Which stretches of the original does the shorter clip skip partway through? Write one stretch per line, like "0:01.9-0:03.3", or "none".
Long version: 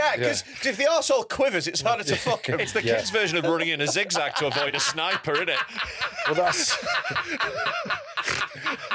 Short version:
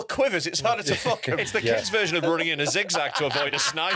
none